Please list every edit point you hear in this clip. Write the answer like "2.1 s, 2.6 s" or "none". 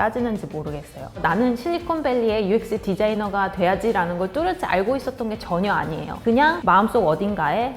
1.2 s